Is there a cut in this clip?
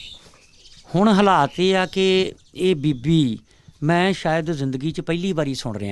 no; 0 cuts

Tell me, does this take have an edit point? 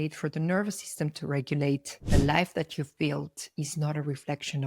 yes; 1 cut; at 1.9 s

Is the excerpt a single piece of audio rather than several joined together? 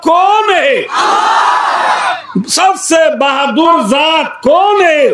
yes; 0 cuts

